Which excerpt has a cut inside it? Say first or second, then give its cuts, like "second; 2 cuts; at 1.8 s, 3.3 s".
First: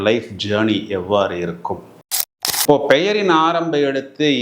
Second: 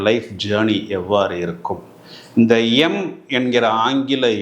first; 1 cut; at 2.3 s